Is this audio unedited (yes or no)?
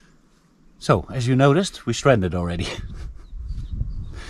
yes